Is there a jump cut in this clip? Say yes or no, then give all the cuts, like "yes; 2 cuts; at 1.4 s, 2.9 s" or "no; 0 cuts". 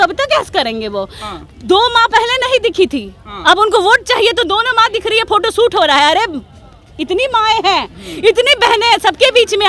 no; 0 cuts